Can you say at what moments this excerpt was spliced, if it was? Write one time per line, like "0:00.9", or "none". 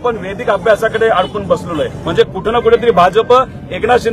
0:02.0